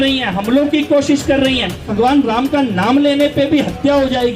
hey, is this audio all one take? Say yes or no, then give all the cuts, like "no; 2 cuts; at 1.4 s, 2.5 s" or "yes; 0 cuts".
no; 1 cut; at 1.9 s